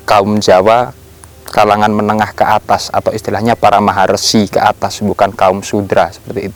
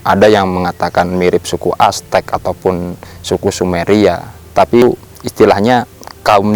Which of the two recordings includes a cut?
second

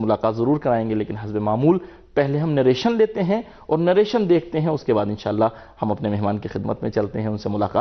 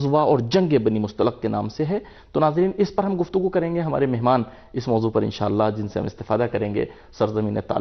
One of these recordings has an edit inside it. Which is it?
second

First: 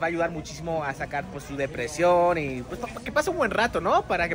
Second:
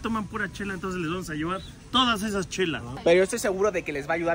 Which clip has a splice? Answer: second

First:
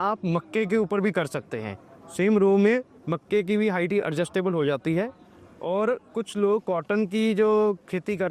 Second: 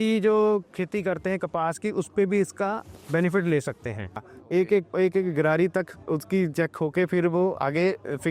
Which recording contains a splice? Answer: second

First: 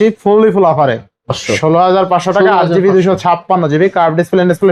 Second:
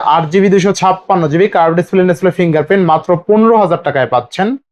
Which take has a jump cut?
first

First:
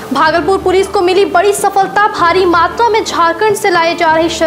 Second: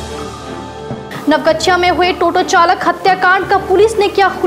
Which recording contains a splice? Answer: second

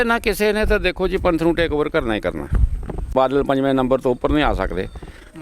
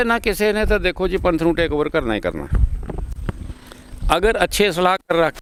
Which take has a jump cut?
first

